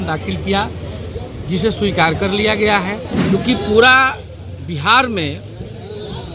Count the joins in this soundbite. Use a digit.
1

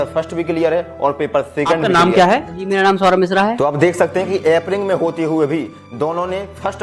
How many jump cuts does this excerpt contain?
2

